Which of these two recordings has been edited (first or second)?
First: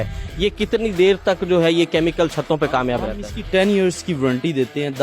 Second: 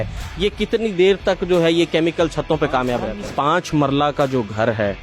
second